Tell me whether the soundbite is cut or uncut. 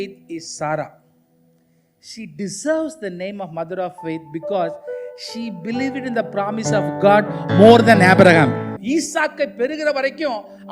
cut